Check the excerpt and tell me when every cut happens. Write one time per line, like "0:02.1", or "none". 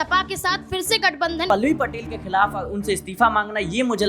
0:01.5